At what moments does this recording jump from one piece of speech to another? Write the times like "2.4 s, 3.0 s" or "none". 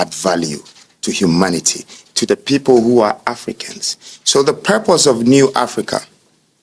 none

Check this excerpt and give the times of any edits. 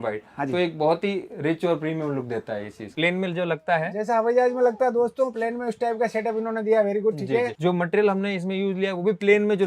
2.9 s

